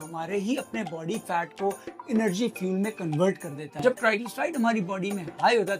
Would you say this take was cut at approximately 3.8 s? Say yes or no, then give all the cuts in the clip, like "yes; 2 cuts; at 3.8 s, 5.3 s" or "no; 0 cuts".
yes; 1 cut; at 3.8 s